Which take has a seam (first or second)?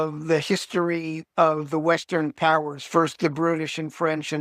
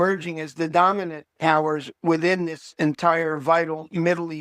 first